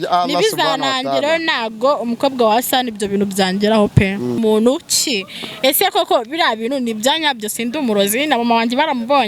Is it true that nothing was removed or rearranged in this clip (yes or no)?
no